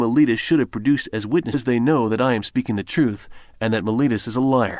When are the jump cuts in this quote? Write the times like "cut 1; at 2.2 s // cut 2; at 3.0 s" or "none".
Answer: none